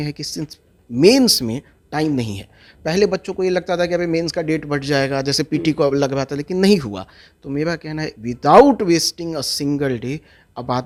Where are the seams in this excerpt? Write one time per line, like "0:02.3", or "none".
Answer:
none